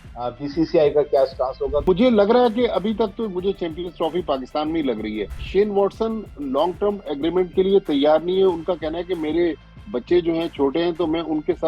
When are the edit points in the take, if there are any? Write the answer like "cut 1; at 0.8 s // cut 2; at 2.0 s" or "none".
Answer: cut 1; at 1.8 s // cut 2; at 5.4 s